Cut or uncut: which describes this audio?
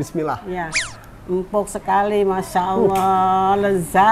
uncut